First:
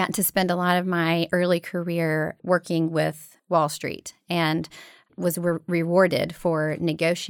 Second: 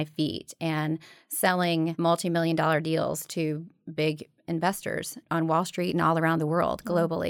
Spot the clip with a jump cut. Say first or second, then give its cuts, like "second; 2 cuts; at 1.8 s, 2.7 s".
second; 2 cuts; at 1.9 s, 5.2 s